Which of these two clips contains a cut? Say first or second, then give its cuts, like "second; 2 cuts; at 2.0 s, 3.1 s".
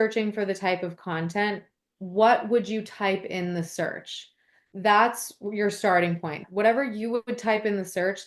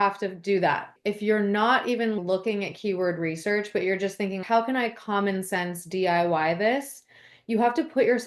second; 1 cut; at 0.9 s